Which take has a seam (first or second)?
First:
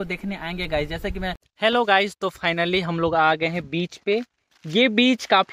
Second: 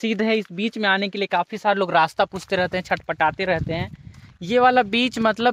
first